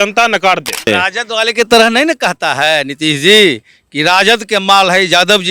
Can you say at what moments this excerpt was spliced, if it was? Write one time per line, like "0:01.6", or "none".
0:00.9